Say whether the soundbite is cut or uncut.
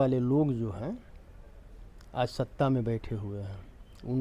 uncut